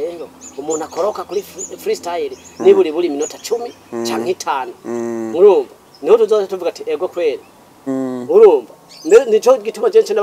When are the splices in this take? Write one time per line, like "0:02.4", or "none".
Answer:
0:07.9